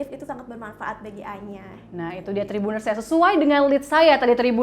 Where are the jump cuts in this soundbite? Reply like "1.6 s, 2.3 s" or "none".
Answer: none